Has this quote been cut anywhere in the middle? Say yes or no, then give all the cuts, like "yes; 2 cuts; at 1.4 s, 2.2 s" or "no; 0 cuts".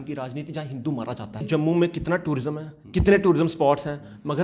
yes; 1 cut; at 1.5 s